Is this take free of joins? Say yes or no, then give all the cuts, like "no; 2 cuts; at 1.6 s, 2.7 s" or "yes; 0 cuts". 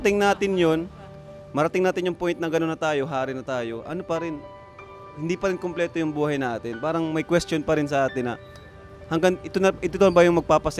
yes; 0 cuts